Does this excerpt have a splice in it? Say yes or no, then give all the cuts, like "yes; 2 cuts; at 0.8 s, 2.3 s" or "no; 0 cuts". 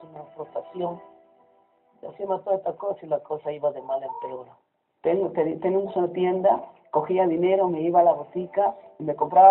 no; 0 cuts